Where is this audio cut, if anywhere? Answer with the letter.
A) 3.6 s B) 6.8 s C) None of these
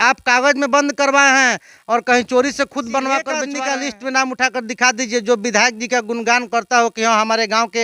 A